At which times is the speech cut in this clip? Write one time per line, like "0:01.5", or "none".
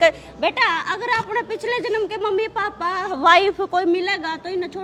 none

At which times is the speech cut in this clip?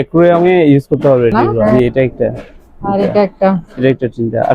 0:01.7

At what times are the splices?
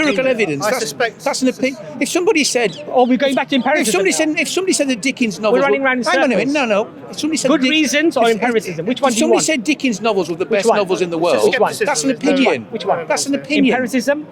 none

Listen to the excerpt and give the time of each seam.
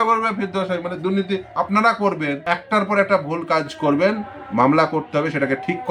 0:02.4

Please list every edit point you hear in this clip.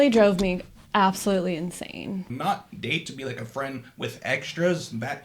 0:02.3

